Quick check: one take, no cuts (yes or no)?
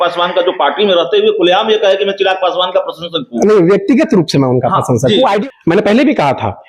no